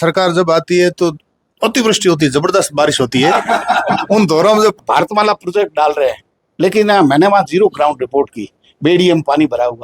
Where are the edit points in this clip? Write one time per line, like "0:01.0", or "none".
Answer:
0:04.8